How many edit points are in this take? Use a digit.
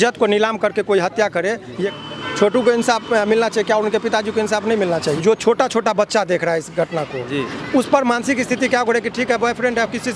2